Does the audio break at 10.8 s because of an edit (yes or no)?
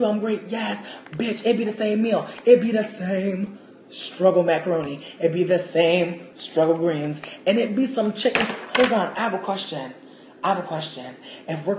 no